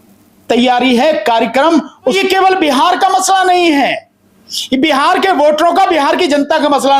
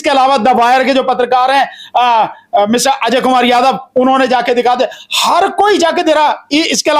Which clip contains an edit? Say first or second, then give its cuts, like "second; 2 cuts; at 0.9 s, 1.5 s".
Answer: first; 1 cut; at 2.2 s